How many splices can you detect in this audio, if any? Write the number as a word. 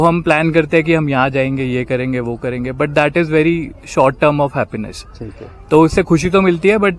zero